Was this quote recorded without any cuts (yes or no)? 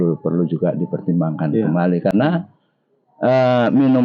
yes